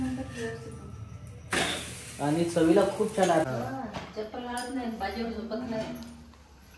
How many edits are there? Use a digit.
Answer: 1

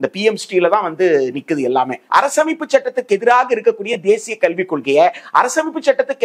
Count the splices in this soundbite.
1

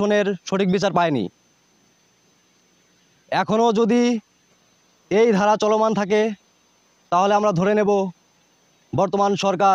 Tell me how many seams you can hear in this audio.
0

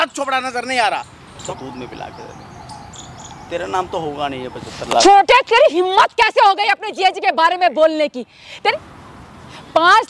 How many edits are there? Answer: 2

